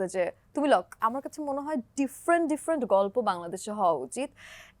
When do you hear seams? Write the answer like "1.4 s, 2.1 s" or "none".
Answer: 1.0 s